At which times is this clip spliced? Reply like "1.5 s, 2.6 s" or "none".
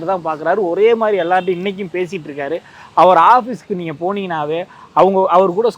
none